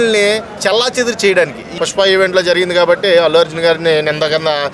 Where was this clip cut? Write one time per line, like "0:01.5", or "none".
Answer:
0:01.7